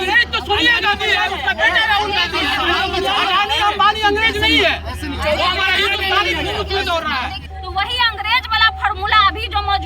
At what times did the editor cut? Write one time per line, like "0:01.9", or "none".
0:07.5

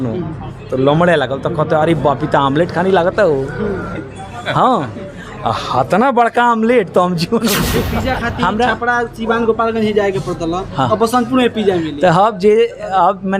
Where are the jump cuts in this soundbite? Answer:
0:07.9

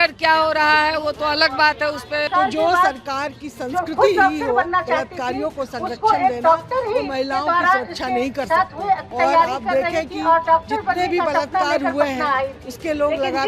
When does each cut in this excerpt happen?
0:02.3
0:09.1

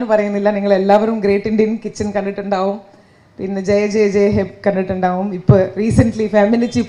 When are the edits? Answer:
none

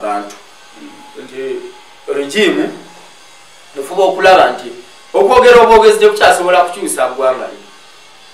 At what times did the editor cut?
none

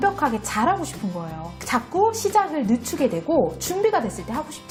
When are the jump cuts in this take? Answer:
none

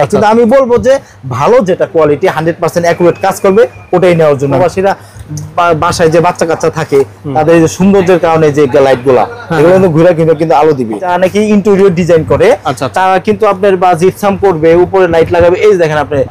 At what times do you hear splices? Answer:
0:04.6
0:11.1

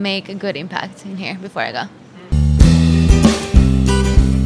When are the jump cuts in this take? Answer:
0:02.2

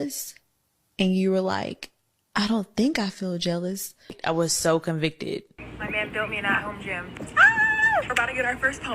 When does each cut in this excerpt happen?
0:04.1
0:05.6

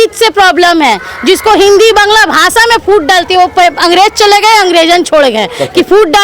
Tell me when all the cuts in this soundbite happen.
none

